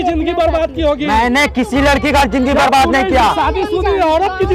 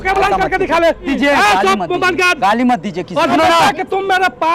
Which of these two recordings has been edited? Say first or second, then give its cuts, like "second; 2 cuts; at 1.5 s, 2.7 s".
second; 2 cuts; at 1.1 s, 3.3 s